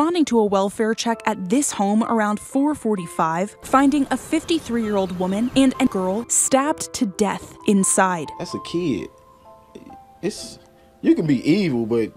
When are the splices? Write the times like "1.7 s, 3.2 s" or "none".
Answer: 5.9 s